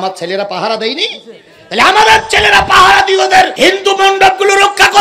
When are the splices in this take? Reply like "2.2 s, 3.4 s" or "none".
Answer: 3.5 s

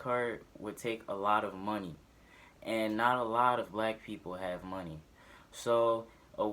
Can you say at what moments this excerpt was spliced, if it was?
5.0 s

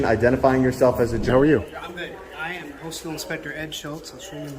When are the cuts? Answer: 1.3 s

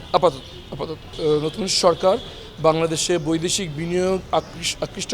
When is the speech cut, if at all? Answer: 1.1 s

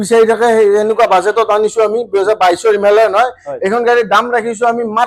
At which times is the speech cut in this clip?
none

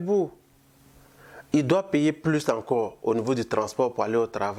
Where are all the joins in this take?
none

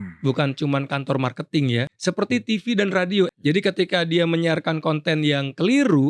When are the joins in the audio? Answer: 1.9 s, 3.3 s

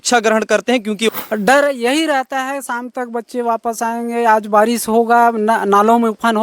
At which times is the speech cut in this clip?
1.1 s

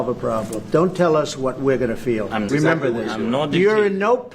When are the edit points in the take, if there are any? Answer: 2.5 s

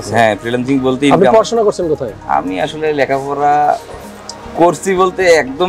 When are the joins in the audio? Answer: none

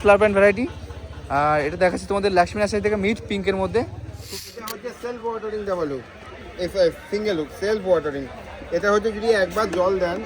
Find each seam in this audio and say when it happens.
4.3 s

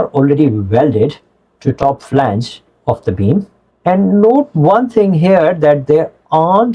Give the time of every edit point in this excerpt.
3.6 s

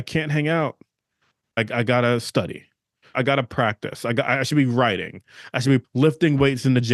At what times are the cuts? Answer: 1.6 s, 3.1 s, 5.9 s

